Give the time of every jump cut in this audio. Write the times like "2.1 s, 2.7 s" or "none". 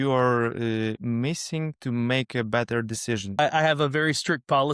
3.4 s